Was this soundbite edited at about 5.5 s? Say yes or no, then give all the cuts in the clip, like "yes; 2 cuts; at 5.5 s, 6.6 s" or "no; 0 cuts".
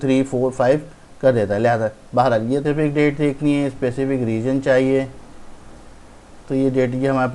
no; 1 cut; at 2.6 s